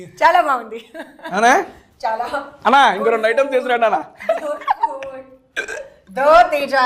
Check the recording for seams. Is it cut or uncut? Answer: uncut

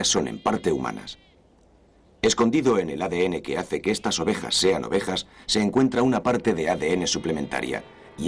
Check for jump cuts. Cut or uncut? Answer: cut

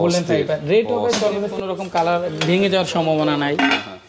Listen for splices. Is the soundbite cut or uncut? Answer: cut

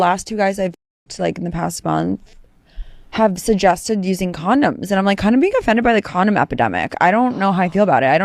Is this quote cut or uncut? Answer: uncut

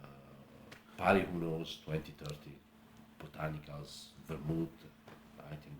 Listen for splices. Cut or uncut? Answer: cut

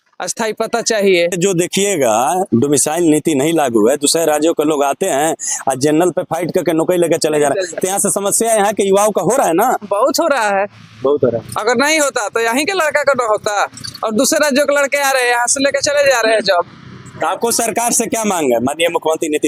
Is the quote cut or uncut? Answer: uncut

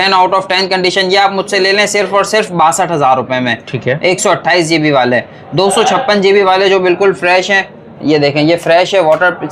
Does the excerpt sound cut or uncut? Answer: uncut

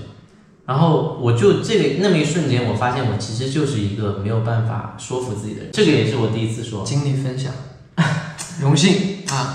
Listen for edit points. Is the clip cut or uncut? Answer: cut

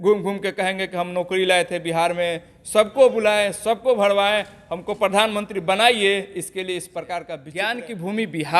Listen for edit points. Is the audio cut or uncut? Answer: cut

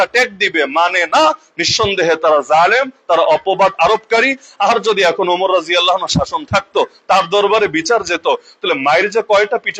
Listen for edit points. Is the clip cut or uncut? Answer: uncut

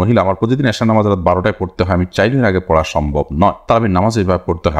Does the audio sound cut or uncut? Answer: uncut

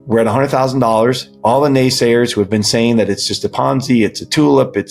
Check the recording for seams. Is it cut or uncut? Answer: uncut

